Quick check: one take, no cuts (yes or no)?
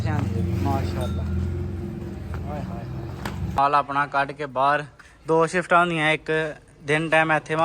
no